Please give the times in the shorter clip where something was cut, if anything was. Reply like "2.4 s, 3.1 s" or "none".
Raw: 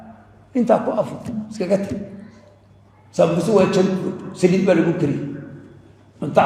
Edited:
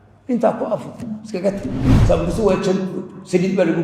1.9 s